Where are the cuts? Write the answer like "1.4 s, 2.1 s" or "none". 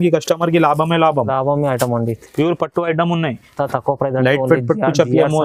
none